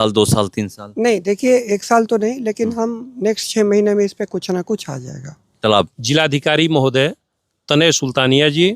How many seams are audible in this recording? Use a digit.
1